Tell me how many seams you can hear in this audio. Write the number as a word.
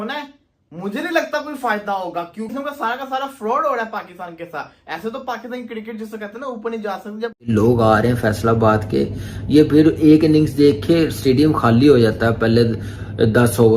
two